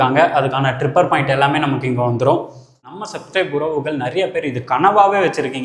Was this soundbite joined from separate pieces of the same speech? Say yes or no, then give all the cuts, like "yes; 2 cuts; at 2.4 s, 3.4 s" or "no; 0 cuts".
yes; 1 cut; at 3.1 s